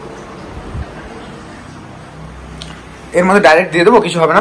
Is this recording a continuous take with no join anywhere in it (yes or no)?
yes